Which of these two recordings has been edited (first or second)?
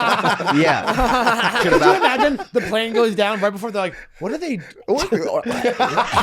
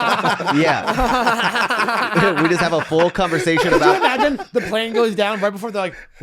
first